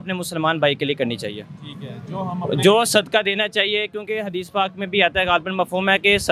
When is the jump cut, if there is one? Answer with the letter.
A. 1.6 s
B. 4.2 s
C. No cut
C